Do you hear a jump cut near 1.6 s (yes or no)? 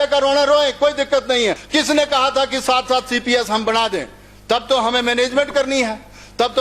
yes